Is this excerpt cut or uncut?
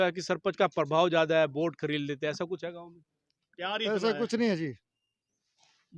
uncut